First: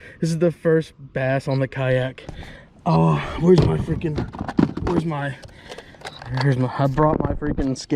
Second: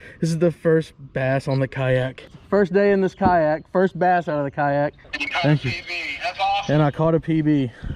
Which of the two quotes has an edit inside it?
second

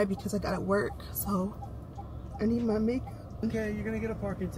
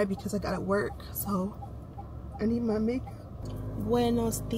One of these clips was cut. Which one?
first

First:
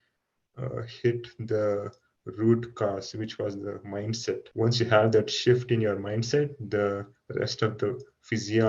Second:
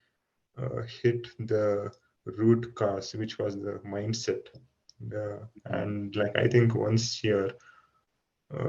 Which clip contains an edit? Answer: first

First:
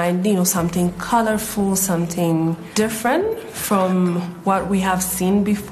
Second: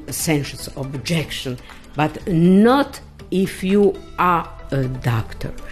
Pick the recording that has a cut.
first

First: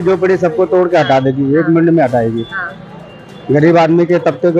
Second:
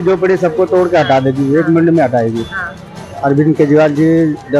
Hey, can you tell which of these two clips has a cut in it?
second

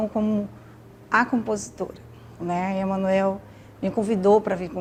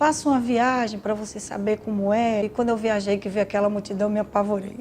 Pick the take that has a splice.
second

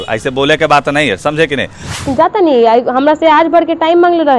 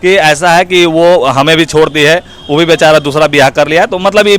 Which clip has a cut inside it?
first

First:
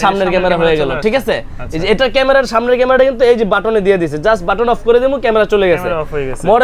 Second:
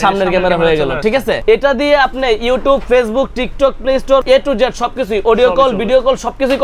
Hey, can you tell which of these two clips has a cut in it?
second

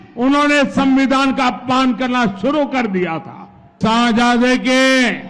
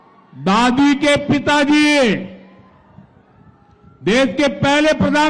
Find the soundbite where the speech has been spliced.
first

